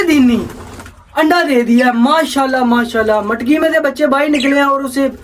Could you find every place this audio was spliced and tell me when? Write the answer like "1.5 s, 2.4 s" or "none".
none